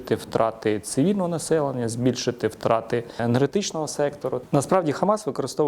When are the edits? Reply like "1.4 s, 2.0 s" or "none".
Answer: 3.2 s, 4.4 s